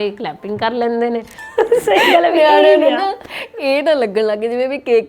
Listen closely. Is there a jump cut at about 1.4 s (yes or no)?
yes